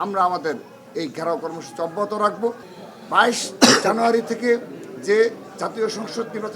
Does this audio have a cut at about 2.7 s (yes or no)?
yes